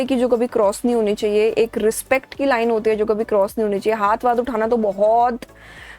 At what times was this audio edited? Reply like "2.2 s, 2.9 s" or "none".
none

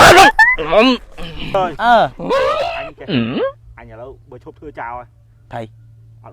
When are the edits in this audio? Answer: 1.5 s, 2.2 s, 3.7 s

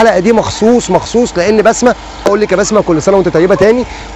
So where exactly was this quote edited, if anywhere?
2.3 s

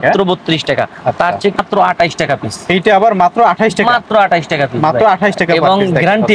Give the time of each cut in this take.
none

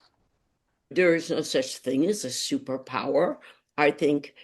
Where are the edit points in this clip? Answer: 0.9 s

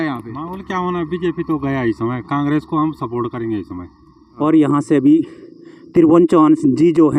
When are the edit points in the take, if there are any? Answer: 4.2 s

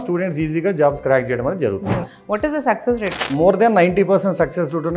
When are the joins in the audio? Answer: 2.1 s, 3.3 s

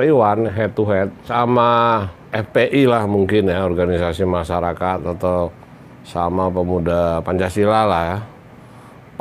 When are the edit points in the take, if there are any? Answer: 1.2 s

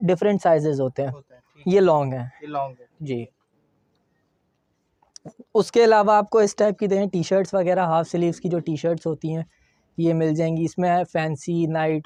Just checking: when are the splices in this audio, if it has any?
none

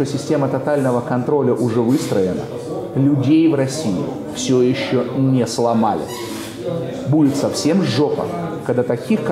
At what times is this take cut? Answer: none

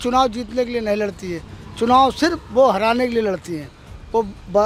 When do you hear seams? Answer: none

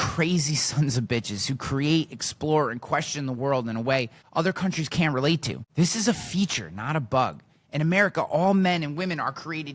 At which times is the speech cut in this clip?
4.2 s

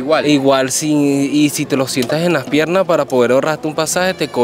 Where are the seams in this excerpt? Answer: none

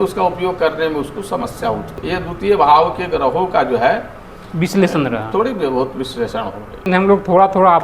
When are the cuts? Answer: 2.0 s, 6.8 s

